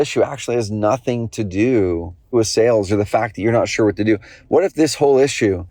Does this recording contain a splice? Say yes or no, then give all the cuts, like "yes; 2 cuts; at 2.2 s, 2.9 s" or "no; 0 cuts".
yes; 1 cut; at 2.3 s